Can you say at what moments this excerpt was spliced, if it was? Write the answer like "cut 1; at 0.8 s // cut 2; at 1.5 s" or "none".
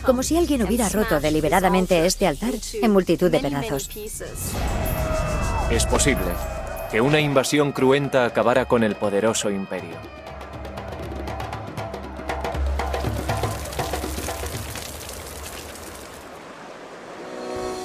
none